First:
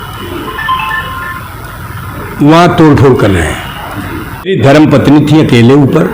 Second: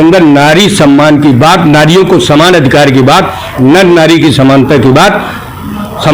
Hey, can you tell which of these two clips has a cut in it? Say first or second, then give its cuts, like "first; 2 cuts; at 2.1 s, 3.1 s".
first; 1 cut; at 4.5 s